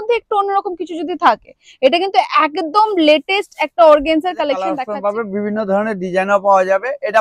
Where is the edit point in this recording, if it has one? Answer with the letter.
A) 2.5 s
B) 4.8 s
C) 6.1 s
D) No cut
B